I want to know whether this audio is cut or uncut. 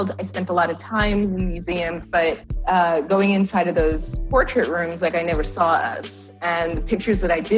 uncut